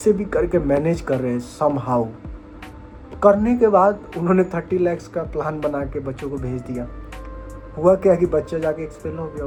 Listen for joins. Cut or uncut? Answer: uncut